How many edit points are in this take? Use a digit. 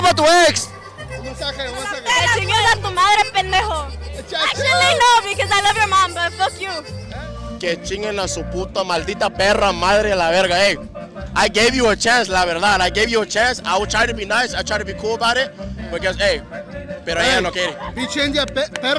1